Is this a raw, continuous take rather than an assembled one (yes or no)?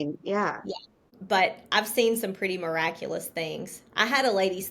no